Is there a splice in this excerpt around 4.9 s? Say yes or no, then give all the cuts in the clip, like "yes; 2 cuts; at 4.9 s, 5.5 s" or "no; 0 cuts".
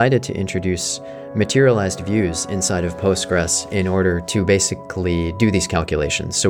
no; 0 cuts